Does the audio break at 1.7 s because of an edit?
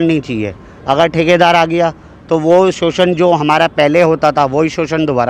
no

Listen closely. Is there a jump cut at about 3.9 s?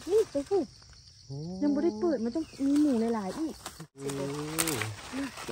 yes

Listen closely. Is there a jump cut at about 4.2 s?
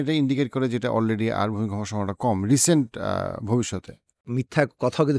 yes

